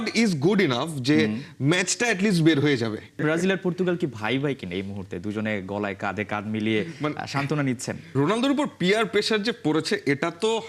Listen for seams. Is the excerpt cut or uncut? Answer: cut